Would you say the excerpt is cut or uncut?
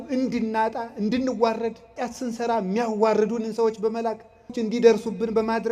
cut